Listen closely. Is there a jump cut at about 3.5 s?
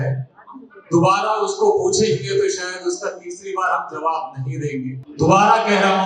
no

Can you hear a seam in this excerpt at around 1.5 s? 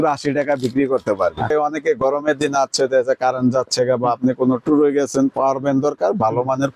yes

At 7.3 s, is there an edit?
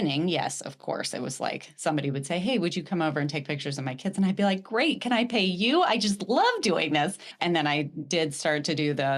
yes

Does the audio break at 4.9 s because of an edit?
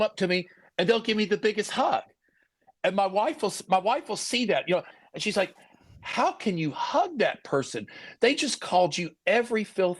yes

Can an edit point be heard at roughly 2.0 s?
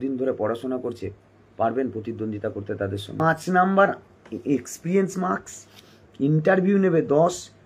no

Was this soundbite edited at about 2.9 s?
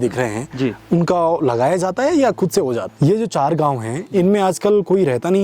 yes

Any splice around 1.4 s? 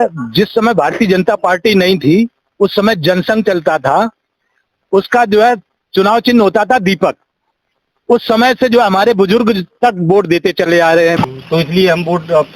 no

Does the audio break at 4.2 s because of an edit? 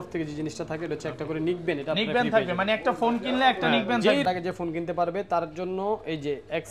yes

